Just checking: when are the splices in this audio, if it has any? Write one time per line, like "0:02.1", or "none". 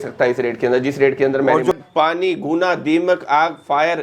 0:01.7